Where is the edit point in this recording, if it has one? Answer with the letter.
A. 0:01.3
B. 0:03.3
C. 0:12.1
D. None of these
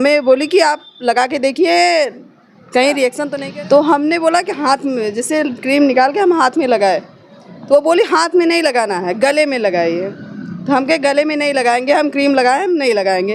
B